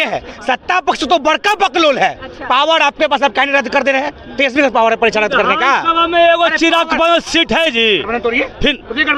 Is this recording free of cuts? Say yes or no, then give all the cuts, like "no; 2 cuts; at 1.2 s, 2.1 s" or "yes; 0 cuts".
yes; 0 cuts